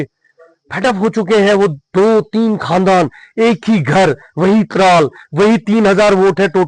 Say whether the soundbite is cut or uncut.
uncut